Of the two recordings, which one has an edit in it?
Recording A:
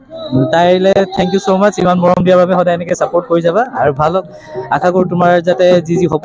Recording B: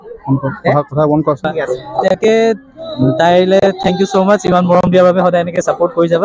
B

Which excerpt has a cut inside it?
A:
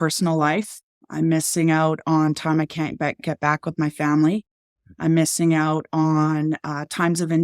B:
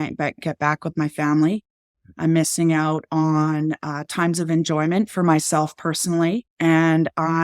B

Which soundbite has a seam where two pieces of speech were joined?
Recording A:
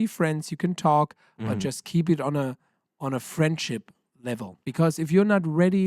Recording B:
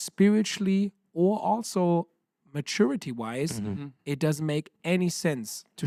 A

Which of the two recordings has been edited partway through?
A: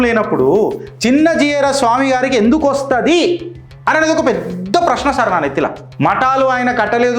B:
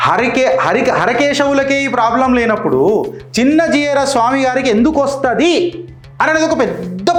A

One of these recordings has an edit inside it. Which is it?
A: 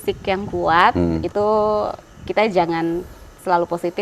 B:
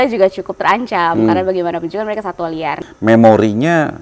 B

